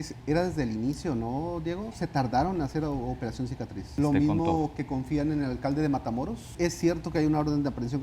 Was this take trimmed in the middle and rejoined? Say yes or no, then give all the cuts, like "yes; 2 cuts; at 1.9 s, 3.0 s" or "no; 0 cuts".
yes; 2 cuts; at 3.9 s, 6.5 s